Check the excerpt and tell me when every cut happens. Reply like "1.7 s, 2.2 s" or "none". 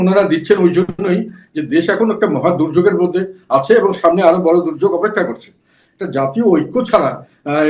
none